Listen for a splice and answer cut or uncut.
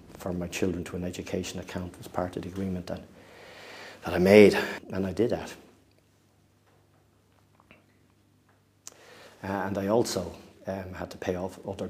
cut